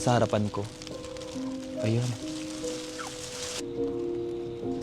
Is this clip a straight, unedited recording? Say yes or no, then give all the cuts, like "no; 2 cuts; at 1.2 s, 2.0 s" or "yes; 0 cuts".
no; 1 cut; at 3.6 s